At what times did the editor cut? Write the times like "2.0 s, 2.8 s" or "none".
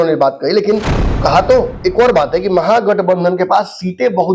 1.7 s